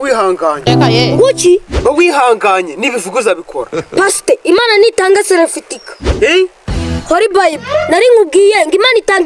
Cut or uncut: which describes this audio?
uncut